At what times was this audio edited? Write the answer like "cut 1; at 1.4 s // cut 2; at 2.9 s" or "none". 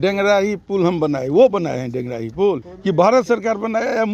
cut 1; at 2.7 s